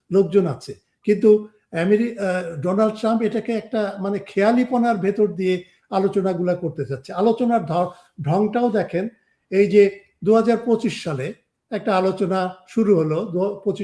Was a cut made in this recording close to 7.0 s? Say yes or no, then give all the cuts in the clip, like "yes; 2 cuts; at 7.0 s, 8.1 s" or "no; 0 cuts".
no; 0 cuts